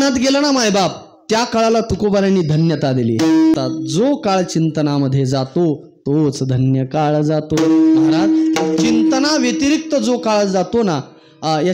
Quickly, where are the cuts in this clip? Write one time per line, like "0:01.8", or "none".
0:03.5